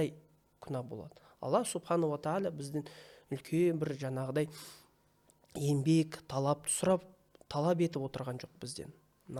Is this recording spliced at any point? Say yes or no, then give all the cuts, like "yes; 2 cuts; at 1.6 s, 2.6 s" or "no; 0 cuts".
no; 0 cuts